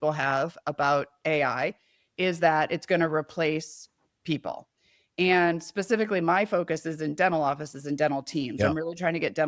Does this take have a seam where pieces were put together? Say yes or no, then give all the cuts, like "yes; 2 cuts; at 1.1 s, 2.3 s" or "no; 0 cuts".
yes; 1 cut; at 1.2 s